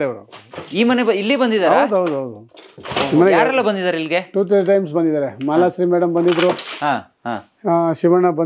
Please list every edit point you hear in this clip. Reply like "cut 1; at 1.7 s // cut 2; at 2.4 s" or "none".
none